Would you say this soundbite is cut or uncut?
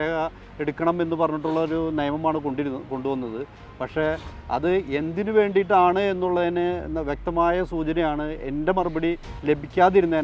uncut